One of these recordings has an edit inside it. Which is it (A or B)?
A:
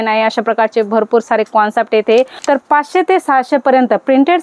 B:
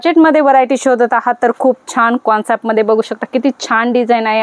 A